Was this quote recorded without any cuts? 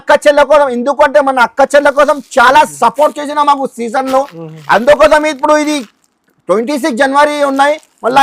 yes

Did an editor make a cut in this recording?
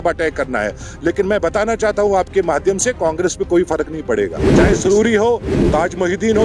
yes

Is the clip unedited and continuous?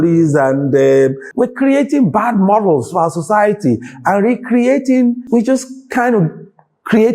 no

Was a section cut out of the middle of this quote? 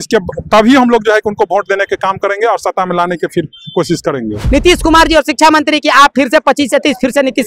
yes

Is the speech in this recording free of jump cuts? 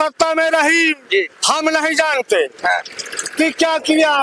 yes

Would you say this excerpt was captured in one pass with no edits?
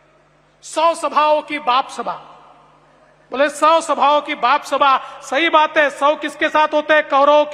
yes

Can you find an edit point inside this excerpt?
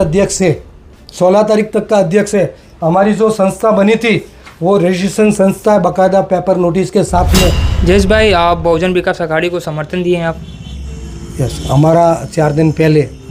yes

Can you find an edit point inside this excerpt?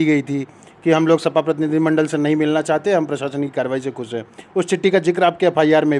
no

